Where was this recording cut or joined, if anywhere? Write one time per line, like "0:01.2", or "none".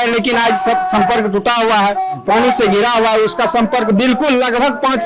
none